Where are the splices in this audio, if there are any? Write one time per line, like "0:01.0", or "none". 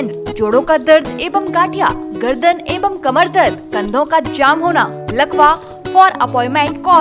0:05.7

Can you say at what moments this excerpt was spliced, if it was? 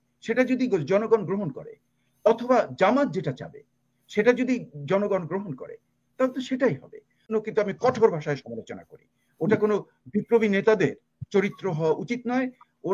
0:07.3

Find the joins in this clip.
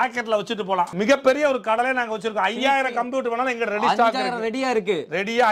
0:00.9

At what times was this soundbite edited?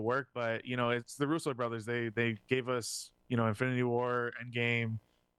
none

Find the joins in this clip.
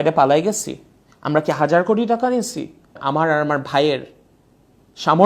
0:03.0

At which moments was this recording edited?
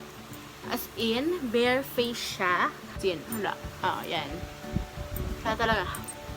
0:02.8

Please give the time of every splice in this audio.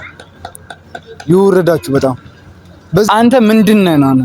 0:03.1

